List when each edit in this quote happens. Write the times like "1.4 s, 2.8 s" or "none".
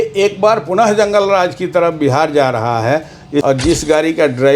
3.4 s